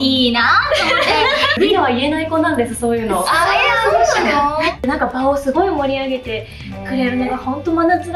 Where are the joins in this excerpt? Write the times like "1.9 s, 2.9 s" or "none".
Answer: 1.6 s, 4.8 s